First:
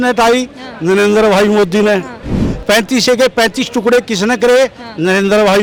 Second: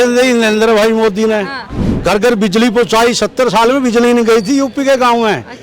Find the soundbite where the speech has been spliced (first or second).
second